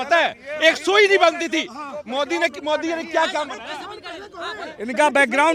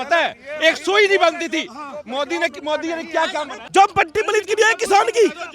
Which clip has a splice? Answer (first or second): second